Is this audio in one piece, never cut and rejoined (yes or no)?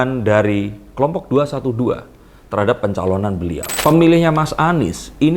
no